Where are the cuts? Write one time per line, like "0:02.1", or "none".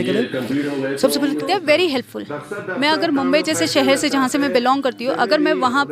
0:01.4